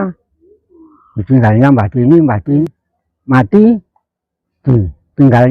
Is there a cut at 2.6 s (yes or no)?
yes